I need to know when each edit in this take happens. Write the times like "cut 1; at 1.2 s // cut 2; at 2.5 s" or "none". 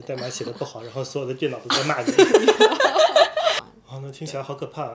cut 1; at 3.7 s